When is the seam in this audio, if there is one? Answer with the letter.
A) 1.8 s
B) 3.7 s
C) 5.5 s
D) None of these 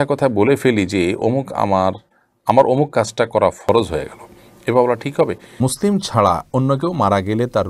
C